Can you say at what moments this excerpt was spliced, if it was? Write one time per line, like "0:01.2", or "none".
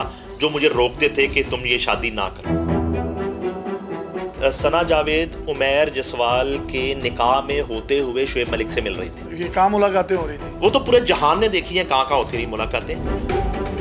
0:04.3

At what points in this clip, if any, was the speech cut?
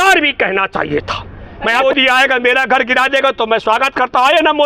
0:01.8

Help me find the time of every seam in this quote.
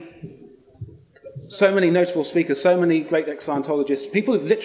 0:01.4

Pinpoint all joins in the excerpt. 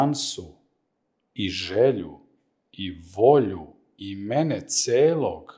none

